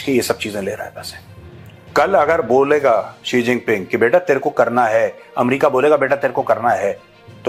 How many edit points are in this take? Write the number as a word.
zero